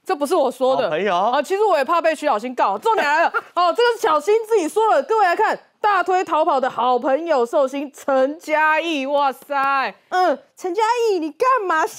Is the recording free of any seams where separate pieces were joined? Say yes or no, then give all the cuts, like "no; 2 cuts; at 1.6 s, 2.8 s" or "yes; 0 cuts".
no; 1 cut; at 10.0 s